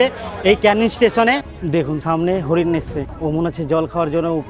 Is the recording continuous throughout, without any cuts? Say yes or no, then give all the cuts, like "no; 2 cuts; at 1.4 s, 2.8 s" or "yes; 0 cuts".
no; 2 cuts; at 1.5 s, 3.1 s